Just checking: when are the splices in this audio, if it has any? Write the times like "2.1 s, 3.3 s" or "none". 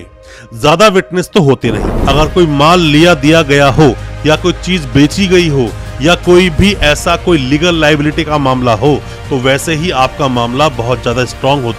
1.9 s